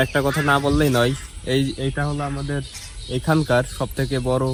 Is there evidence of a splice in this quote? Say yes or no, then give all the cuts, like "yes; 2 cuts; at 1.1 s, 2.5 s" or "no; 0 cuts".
no; 0 cuts